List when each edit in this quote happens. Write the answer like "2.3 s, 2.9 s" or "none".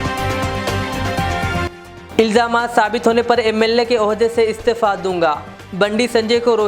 1.6 s